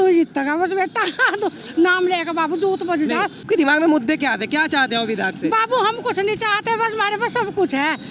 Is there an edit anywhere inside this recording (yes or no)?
no